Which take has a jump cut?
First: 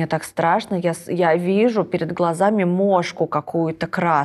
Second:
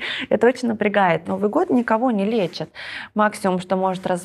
second; 1 cut; at 1.3 s

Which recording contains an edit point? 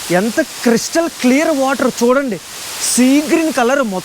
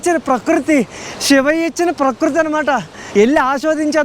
second; 1 cut; at 2.9 s

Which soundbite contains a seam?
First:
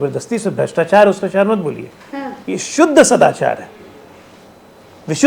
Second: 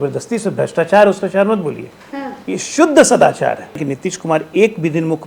second; 1 cut; at 3.8 s

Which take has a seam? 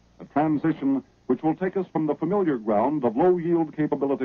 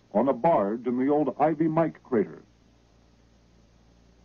first; 1 cut; at 1.6 s

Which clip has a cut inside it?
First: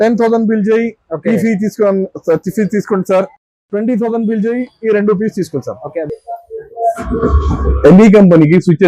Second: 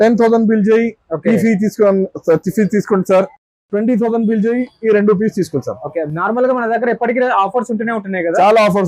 first; 1 cut; at 6.1 s

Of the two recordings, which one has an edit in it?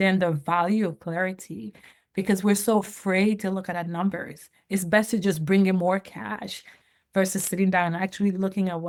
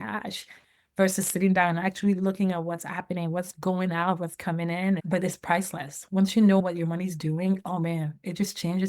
second; 2 cuts; at 5.0 s, 6.6 s

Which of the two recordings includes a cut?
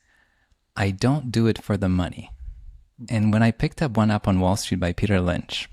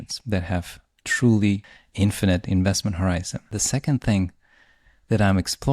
second; 2 cuts; at 1.8 s, 3.5 s

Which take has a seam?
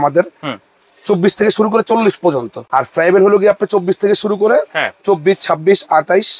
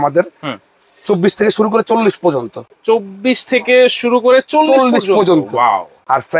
first; 1 cut; at 2.6 s

